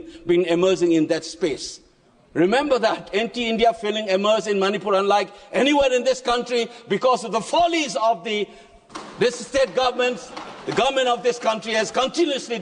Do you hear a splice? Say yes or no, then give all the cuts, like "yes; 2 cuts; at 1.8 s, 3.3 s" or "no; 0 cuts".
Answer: no; 0 cuts